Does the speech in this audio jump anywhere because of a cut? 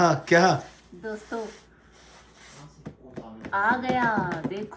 no; 0 cuts

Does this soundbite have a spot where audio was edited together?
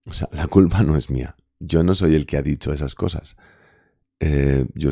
no; 0 cuts

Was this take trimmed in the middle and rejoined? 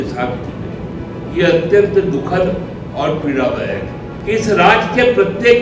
yes; 3 cuts; at 1.1 s, 2.8 s, 4.1 s

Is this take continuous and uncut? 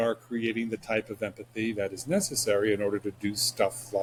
yes; 0 cuts

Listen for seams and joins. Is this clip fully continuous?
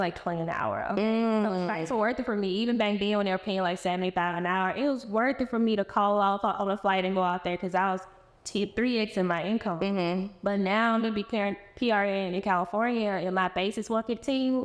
yes; 0 cuts

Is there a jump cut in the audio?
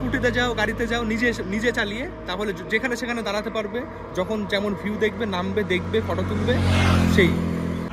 no; 0 cuts

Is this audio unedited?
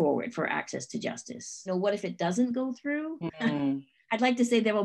no; 1 cut; at 1.7 s

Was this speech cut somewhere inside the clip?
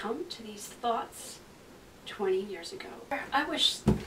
yes; 1 cut; at 3.1 s

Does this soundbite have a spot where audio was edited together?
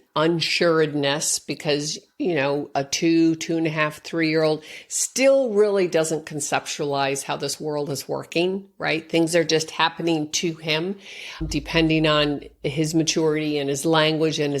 no; 0 cuts

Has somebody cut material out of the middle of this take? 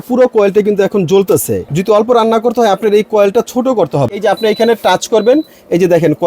yes; 2 cuts; at 1.6 s, 4.2 s

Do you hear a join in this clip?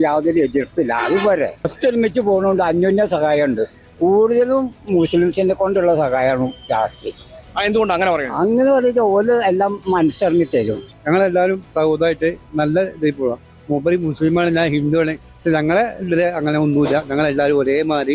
yes; 2 cuts; at 1.7 s, 10.9 s

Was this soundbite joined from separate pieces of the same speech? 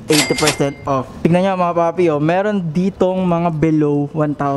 yes; 1 cut; at 1.1 s

